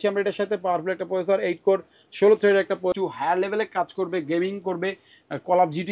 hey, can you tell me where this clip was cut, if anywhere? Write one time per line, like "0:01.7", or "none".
0:02.9